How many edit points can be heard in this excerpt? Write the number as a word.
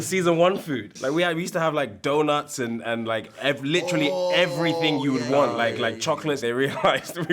two